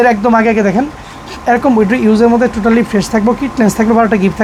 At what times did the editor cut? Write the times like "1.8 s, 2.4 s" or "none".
none